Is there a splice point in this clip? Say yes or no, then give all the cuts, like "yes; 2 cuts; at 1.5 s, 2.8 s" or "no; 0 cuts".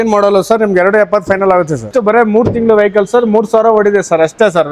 yes; 1 cut; at 1.9 s